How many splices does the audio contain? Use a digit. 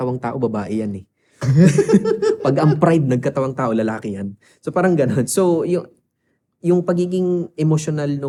0